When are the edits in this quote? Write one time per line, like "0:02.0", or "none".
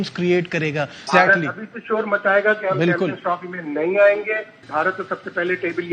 0:01.0
0:04.6